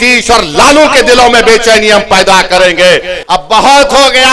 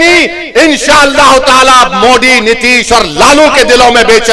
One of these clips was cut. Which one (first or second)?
first